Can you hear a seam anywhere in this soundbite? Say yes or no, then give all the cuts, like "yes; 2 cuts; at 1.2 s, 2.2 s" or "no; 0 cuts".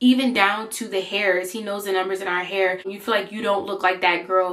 yes; 1 cut; at 2.9 s